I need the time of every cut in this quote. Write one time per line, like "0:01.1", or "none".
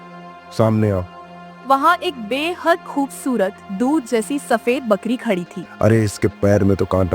0:01.5
0:05.6